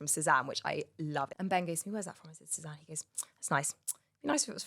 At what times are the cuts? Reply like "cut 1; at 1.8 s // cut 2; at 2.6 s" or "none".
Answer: cut 1; at 1.3 s